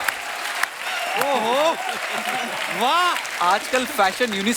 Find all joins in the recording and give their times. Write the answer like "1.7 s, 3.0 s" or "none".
3.3 s